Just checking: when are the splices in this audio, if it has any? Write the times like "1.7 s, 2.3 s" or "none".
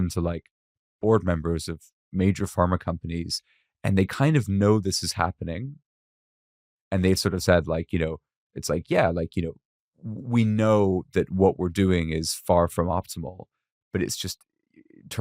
none